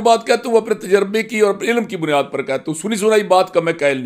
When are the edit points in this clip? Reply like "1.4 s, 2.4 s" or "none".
none